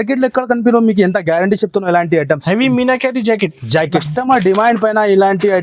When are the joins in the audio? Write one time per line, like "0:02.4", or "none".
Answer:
0:04.1